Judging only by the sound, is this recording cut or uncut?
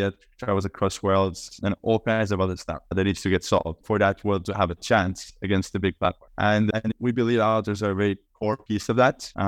uncut